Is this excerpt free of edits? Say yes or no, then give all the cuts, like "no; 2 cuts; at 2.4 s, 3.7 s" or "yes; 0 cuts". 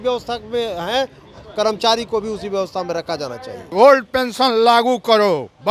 no; 1 cut; at 3.6 s